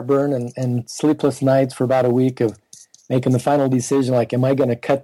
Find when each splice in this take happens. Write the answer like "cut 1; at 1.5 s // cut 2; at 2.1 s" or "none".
none